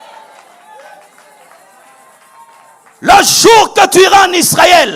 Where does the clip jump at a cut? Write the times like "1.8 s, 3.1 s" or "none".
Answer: none